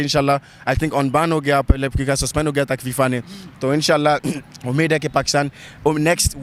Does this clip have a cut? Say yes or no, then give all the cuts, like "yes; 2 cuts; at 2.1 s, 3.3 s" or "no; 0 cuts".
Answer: no; 0 cuts